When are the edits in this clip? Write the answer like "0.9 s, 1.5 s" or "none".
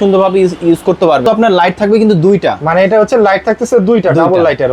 1.2 s